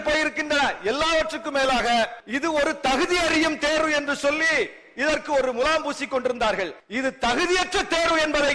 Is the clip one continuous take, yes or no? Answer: no